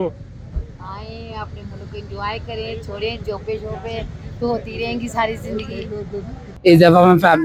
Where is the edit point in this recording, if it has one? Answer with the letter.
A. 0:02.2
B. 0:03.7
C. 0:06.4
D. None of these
C